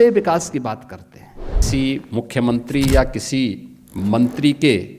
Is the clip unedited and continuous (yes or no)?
no